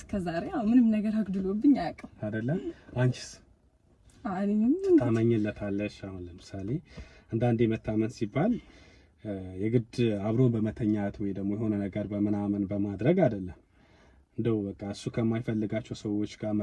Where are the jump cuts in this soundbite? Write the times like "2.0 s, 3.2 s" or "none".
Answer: none

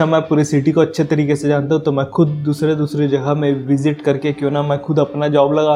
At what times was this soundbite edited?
none

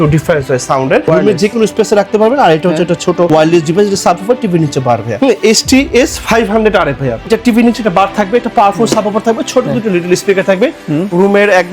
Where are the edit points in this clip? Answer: 1.1 s, 3.3 s, 5.1 s, 7.3 s

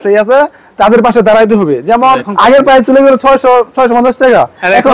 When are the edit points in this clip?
2.3 s

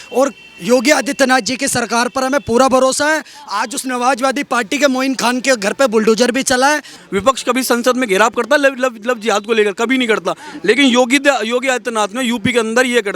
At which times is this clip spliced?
6.9 s

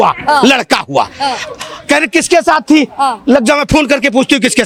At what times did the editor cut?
none

